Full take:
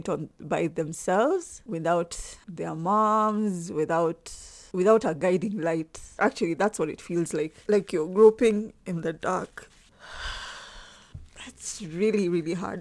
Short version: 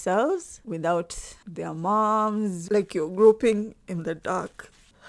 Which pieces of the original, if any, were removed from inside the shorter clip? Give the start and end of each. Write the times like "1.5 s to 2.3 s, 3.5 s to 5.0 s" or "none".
3.6 s to 7.6 s